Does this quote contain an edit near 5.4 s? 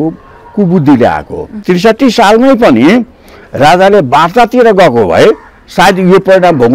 no; 1 cut; at 1.5 s

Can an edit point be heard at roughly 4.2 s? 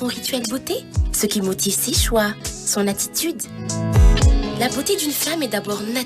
yes; 1 cut; at 4.2 s

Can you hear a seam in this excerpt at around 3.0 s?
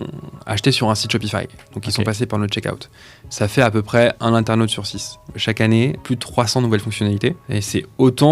no; 3 cuts; at 5.3 s, 6.0 s, 7.4 s

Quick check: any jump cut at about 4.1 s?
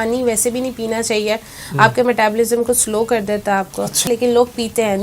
yes; 1 cut; at 4.1 s

